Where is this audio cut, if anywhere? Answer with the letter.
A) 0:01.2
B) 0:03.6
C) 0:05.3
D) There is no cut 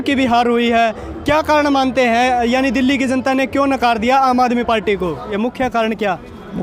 C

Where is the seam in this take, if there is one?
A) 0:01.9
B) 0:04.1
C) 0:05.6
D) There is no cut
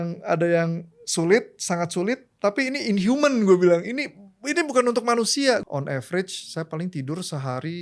C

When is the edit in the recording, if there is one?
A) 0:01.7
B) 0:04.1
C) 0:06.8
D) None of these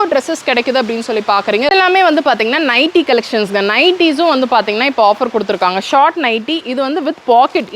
A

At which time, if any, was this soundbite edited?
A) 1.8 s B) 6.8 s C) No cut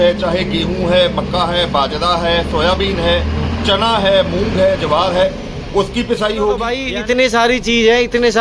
B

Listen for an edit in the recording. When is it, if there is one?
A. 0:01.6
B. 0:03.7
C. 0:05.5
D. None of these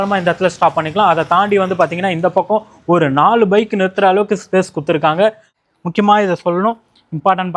C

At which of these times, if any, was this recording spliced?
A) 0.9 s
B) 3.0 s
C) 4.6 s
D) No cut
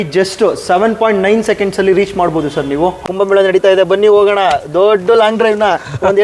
B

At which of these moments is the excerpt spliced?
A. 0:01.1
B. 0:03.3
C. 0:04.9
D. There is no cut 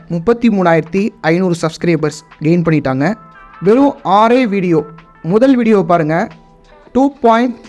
B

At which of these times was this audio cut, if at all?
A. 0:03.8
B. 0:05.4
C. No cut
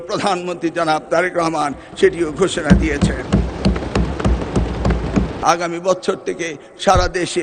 B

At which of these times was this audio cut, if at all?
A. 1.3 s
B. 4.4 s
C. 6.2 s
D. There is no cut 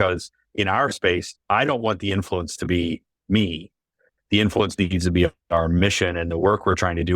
A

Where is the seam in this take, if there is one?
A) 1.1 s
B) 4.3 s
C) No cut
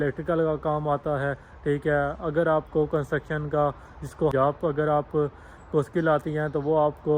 B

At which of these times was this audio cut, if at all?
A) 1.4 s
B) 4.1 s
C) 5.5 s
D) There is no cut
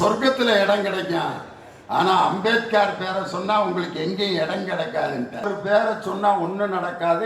C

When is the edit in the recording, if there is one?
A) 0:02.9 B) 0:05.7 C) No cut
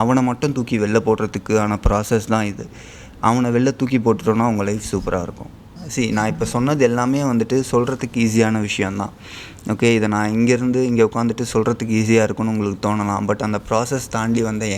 B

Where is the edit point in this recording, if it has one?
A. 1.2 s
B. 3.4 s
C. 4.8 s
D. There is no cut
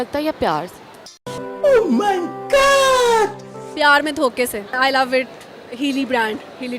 C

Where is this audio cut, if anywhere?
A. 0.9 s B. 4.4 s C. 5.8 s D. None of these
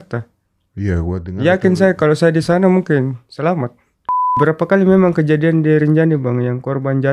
B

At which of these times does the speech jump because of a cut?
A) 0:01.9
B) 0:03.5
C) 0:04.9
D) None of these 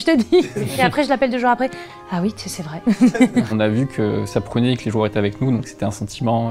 B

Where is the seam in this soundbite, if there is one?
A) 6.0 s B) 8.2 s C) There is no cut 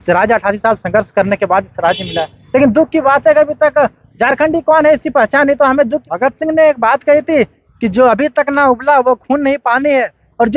A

